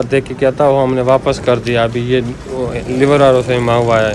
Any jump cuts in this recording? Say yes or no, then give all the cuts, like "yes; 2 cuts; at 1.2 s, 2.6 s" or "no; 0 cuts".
no; 0 cuts